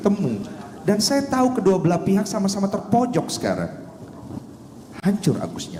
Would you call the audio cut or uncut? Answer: uncut